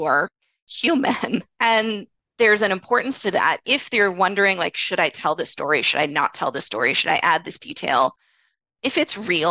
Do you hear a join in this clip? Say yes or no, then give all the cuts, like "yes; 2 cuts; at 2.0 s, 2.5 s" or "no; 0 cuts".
yes; 1 cut; at 1.7 s